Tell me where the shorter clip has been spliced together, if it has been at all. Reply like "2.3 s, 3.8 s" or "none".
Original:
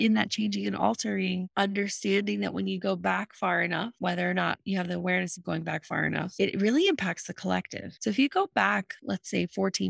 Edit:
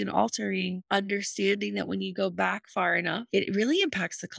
3.2 s